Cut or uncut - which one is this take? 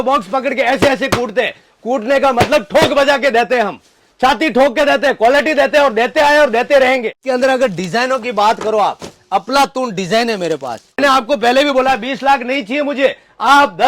cut